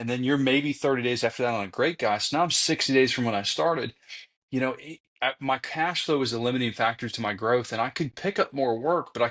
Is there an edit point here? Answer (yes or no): no